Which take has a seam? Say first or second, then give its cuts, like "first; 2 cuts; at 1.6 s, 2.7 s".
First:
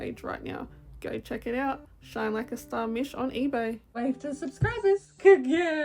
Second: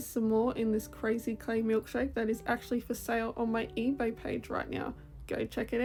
first; 1 cut; at 3.8 s